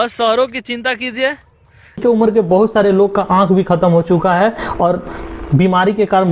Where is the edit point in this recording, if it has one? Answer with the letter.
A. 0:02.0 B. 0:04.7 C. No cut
A